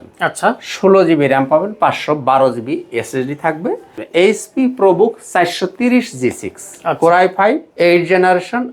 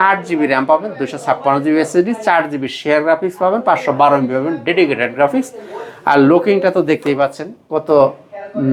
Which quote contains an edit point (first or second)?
first